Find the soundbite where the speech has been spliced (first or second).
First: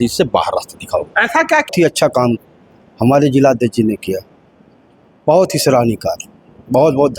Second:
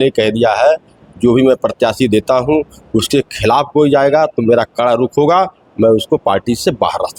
first